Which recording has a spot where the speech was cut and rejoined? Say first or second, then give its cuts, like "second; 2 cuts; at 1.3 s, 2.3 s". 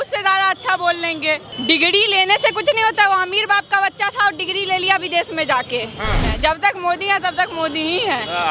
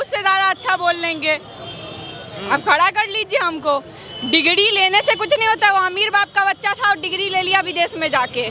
first; 2 cuts; at 1.5 s, 6.2 s